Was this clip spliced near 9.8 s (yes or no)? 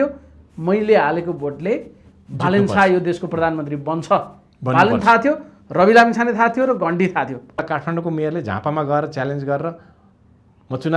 no